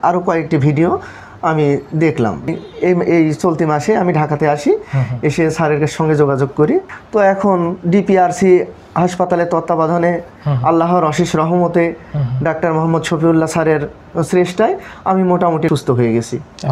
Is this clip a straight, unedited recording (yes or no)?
no